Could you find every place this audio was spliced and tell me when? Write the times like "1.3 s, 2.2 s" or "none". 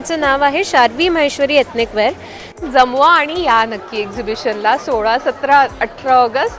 2.6 s